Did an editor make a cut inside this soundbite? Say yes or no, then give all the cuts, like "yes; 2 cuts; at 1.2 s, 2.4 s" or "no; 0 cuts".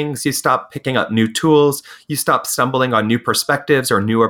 no; 0 cuts